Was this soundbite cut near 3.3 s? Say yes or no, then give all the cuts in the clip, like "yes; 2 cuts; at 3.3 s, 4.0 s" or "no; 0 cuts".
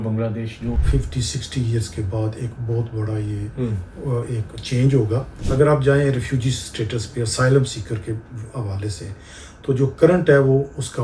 no; 2 cuts; at 0.8 s, 5.3 s